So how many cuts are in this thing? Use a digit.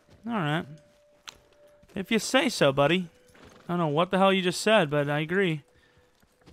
0